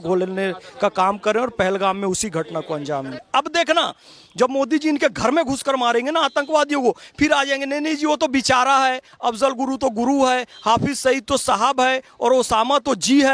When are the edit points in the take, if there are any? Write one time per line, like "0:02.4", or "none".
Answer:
0:03.3